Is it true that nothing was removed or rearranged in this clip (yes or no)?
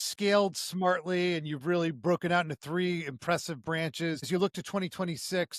no